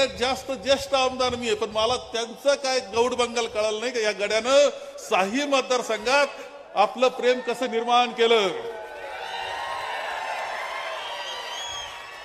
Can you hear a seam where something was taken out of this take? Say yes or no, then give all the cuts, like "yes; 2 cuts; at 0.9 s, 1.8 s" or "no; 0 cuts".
no; 0 cuts